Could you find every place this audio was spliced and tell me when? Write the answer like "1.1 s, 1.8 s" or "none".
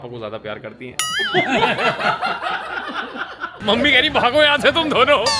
3.5 s